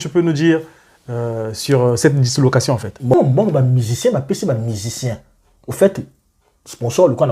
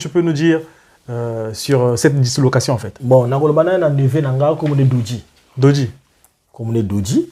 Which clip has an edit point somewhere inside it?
first; 1 cut; at 3.1 s

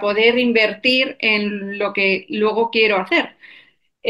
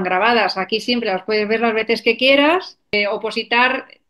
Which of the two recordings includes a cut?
second; 1 cut; at 2.9 s

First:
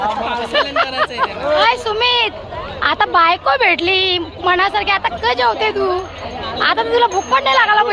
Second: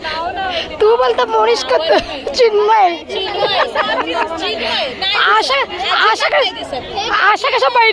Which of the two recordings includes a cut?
first; 1 cut; at 1.6 s

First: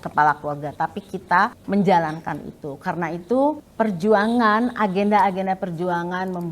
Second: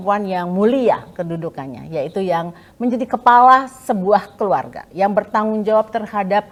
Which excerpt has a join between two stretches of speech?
first; 2 cuts; at 1.6 s, 3.7 s

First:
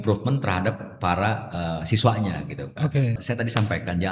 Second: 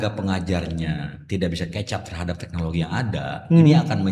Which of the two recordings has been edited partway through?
first; 1 cut; at 3.2 s

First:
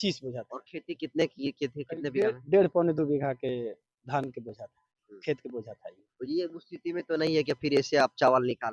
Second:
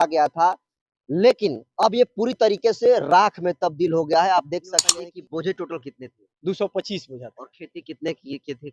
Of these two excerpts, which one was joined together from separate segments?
second; 1 cut; at 4.9 s

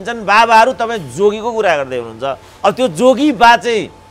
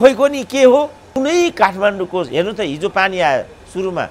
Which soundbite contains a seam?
second; 1 cut; at 1.0 s

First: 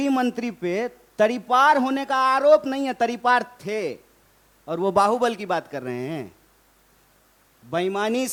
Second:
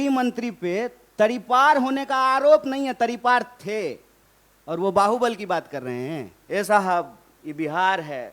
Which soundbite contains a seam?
second; 1 cut; at 6.3 s

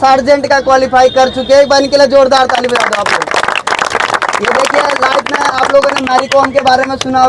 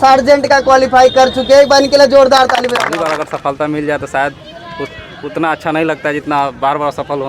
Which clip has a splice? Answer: second; 1 cut; at 2.9 s

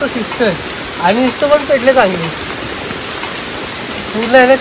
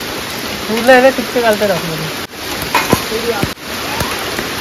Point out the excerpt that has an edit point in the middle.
second; 2 cuts; at 2.3 s, 3.5 s

